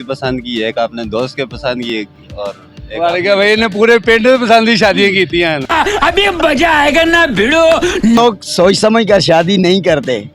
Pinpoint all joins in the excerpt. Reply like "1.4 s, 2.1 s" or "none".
none